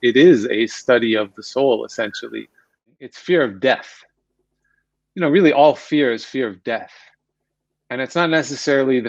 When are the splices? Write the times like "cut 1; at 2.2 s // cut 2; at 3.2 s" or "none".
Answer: cut 1; at 2.8 s